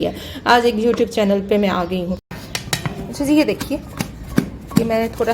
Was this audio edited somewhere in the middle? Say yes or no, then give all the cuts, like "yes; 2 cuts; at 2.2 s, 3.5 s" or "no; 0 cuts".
yes; 1 cut; at 2.5 s